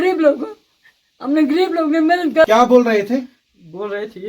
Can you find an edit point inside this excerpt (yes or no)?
yes